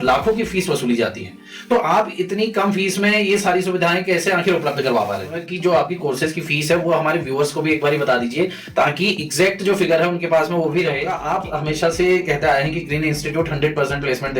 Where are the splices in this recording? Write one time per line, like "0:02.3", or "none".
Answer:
0:05.4
0:11.1